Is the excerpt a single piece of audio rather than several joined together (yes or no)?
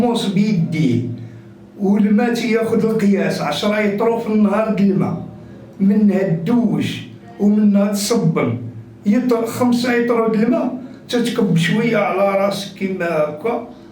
yes